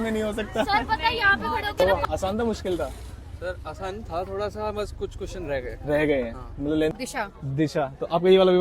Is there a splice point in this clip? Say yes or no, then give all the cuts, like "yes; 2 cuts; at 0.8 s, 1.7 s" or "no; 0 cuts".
yes; 2 cuts; at 1.7 s, 6.9 s